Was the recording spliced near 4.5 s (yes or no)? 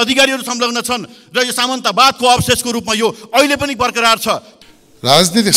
yes